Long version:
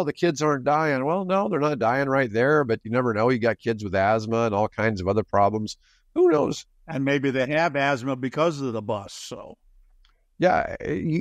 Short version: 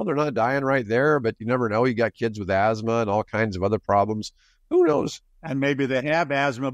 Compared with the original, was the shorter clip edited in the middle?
no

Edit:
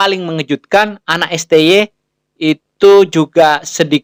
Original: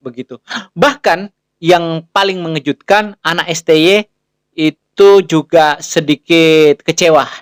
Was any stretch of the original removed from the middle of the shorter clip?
no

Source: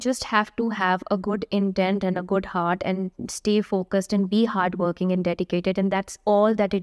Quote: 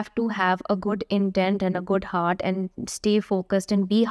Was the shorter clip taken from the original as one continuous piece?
yes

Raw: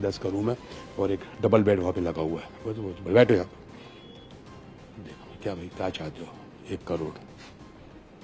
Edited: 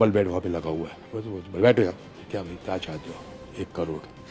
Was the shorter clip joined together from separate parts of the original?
yes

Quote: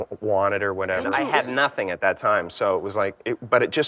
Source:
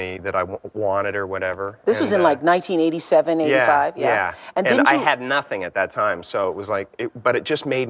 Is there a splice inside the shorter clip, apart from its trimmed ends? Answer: yes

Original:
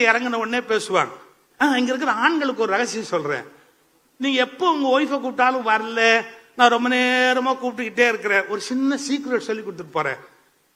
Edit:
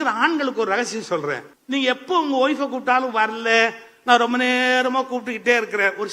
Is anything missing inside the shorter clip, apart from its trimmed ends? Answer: yes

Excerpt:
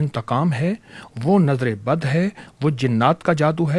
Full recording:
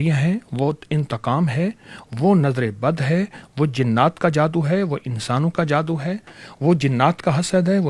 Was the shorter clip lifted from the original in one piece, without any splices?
yes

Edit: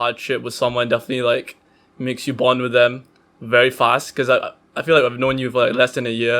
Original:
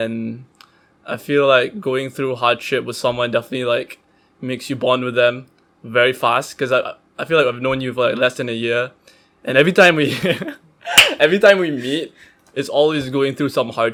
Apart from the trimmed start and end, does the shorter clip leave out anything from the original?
no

